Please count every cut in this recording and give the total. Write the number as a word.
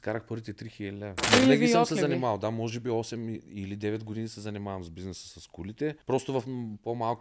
two